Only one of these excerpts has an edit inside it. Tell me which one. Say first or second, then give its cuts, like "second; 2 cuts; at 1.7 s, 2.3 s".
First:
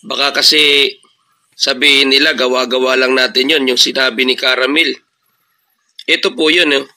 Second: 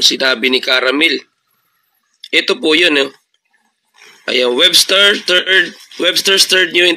second; 1 cut; at 4.4 s